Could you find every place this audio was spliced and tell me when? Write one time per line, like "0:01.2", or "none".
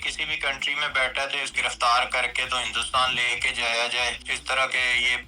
0:01.5
0:04.3